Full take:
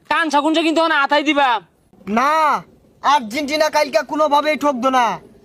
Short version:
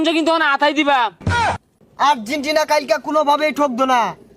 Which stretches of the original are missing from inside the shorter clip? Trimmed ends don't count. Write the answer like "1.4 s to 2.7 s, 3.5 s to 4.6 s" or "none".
2.1 s to 2.6 s